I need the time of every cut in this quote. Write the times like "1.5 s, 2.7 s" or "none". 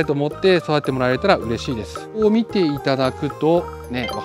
2.2 s